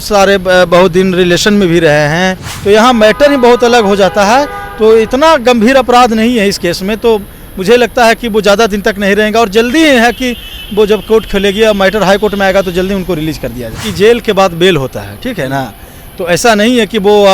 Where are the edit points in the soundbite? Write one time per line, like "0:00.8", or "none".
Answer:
0:02.5
0:13.8

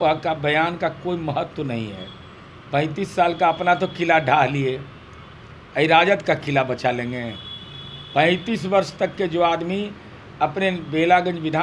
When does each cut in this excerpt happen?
none

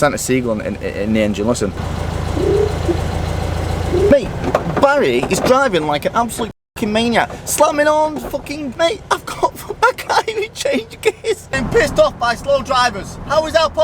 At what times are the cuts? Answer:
0:01.8
0:04.1
0:08.7
0:11.4

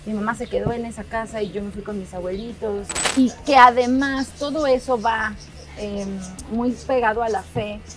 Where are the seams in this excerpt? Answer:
0:03.0

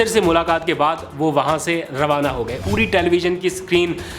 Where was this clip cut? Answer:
0:02.6

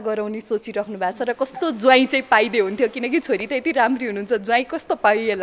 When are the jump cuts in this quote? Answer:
none

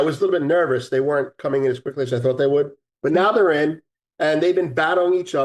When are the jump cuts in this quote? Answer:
0:02.8

